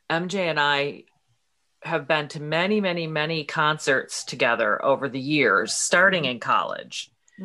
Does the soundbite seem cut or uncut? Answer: uncut